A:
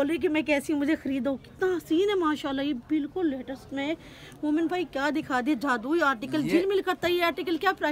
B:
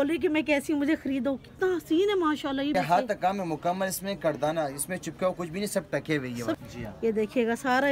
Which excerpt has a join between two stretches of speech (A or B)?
B